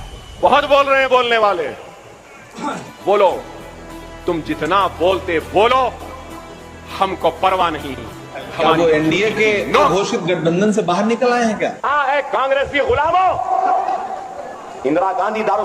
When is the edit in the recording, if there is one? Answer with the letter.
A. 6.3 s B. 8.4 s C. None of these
B